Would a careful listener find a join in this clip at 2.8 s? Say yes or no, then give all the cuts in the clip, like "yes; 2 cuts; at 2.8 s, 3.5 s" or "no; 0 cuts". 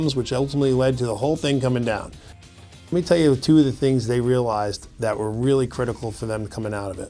yes; 1 cut; at 2.8 s